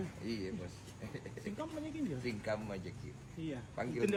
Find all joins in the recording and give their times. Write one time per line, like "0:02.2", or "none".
none